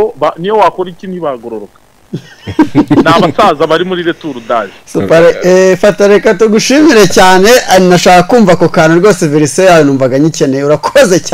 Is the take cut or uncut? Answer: uncut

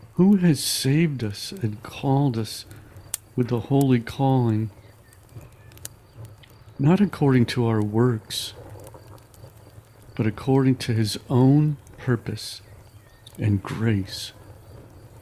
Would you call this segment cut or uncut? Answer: cut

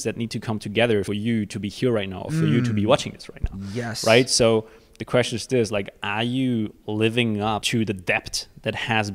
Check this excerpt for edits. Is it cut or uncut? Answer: cut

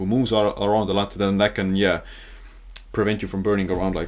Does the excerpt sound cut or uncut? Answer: uncut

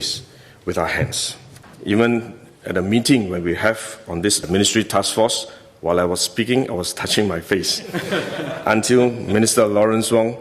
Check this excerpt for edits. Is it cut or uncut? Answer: cut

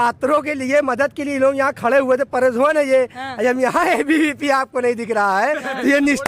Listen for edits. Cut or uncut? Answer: uncut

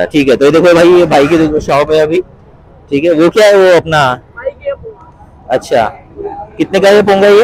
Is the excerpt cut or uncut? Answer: uncut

